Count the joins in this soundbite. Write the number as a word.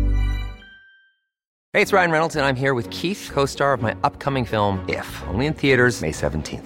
one